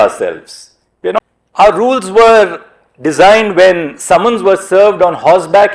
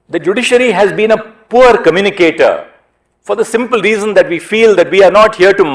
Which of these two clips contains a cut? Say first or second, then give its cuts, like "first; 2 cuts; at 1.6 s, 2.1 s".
first; 1 cut; at 1.2 s